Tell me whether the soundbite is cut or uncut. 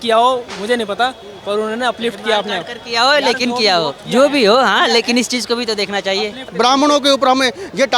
cut